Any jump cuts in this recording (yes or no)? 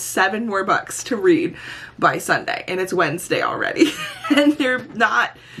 no